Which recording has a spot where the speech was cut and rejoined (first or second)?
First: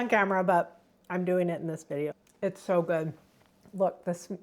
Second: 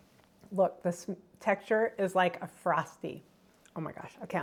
first